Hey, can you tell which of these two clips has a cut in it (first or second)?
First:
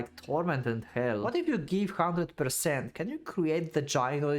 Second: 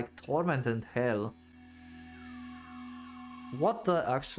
first